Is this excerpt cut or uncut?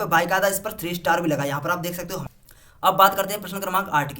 cut